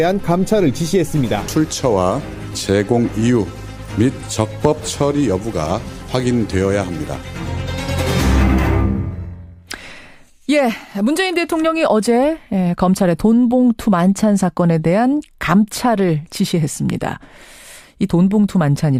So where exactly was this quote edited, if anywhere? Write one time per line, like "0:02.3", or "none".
none